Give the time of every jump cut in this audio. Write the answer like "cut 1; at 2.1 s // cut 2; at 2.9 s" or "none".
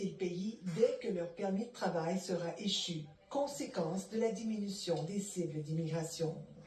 none